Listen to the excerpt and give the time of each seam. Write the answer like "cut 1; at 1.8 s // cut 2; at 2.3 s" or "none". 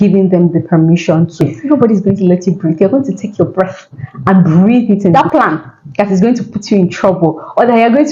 cut 1; at 1.5 s // cut 2; at 5.1 s